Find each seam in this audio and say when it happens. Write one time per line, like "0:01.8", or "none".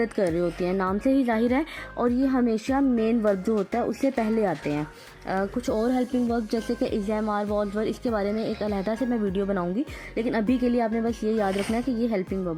none